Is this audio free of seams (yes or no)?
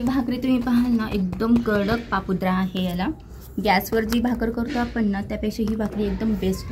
yes